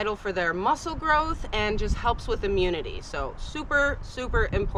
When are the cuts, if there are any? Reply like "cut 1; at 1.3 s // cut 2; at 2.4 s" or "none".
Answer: none